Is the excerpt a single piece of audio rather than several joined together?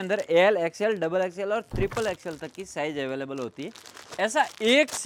yes; 0 cuts

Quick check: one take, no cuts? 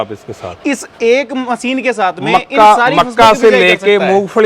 yes; 0 cuts

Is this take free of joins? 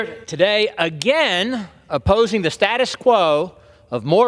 no; 1 cut; at 2.5 s

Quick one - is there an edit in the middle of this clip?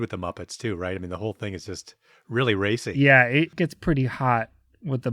yes; 1 cut; at 3.5 s

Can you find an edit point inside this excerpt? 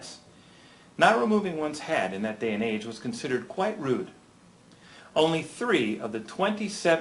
no; 0 cuts

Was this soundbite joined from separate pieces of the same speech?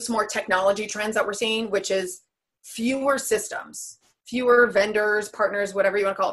no; 0 cuts

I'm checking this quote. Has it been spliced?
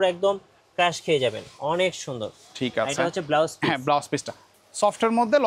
yes; 1 cut; at 4.4 s

